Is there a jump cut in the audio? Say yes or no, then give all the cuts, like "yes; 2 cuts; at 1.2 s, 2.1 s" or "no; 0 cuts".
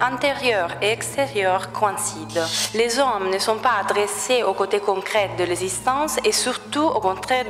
yes; 1 cut; at 2.6 s